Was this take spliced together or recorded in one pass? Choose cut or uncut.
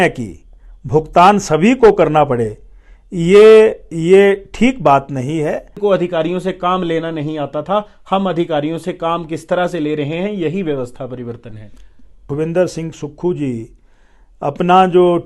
cut